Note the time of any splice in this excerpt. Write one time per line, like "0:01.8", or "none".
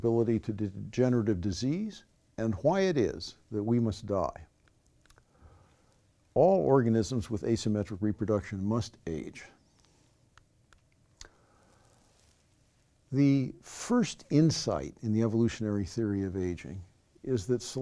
0:16.2